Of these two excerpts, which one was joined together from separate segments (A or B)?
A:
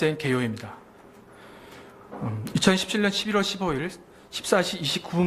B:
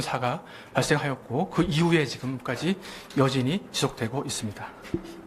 B